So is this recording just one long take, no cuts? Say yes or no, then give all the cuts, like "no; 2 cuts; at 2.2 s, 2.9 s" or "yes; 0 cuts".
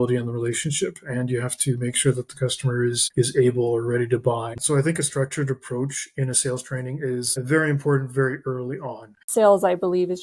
no; 4 cuts; at 3.0 s, 4.6 s, 7.3 s, 9.2 s